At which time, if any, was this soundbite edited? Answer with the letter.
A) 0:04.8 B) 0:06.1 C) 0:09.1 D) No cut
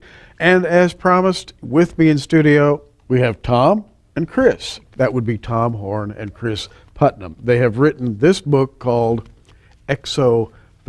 B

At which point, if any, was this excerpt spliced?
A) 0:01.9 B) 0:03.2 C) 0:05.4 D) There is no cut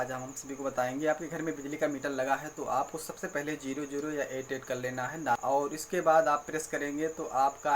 C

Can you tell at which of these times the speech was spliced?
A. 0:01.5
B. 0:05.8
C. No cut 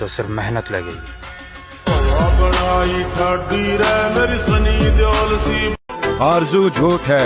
B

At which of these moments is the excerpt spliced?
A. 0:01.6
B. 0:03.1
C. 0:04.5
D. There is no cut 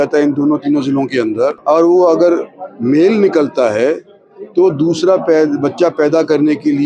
A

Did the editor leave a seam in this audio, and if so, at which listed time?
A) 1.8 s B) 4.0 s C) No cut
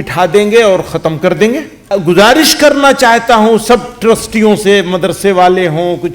A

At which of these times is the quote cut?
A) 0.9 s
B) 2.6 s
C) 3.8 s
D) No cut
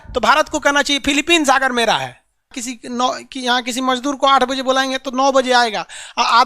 B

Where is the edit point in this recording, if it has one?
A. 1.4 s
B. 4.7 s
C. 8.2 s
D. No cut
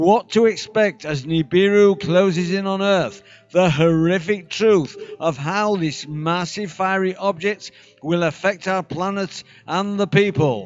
D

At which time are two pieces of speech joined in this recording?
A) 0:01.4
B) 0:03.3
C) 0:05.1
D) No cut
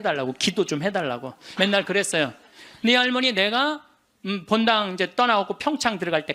A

